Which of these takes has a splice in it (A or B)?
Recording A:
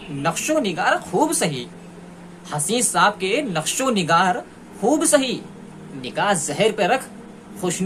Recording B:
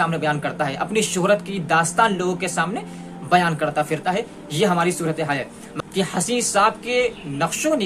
B